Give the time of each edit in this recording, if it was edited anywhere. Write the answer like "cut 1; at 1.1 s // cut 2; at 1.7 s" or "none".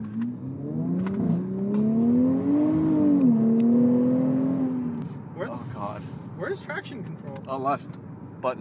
cut 1; at 5.1 s